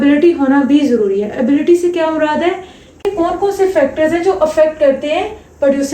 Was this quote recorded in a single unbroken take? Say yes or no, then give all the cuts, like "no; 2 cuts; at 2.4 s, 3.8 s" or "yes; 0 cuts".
no; 1 cut; at 3.1 s